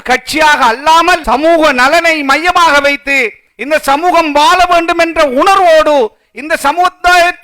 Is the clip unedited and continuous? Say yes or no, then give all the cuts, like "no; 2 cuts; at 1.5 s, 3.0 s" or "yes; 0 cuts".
no; 1 cut; at 1.2 s